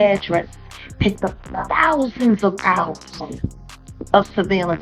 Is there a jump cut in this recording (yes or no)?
no